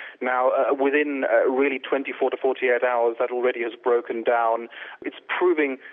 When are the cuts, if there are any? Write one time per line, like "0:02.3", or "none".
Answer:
0:05.0